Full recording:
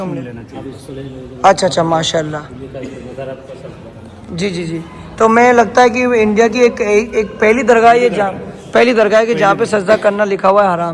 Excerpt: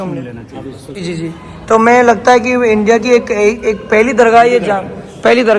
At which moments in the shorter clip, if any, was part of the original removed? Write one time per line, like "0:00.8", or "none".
0:01.0